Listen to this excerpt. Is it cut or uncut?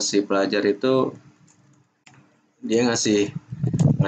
uncut